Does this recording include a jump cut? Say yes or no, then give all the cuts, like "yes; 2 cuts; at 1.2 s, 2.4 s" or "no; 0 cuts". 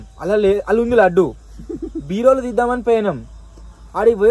no; 0 cuts